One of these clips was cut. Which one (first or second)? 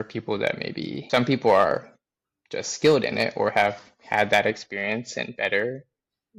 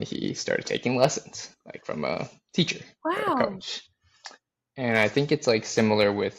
first